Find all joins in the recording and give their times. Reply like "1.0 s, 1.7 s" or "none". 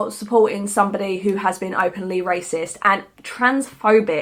none